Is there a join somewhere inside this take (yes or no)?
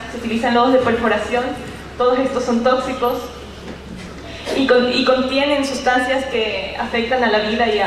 yes